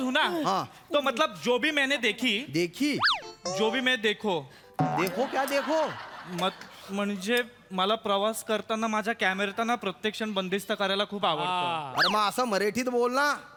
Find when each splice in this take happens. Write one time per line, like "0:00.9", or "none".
none